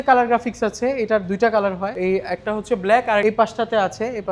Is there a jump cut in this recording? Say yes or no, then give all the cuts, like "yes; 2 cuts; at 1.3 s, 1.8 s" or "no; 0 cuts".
yes; 2 cuts; at 1.9 s, 3.2 s